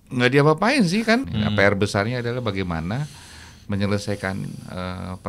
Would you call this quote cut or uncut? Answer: cut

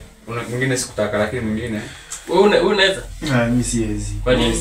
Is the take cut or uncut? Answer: uncut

